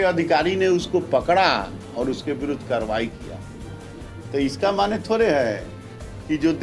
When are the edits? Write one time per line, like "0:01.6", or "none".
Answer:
none

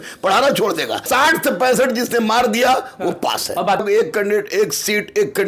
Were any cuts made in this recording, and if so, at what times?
0:01.1
0:03.8

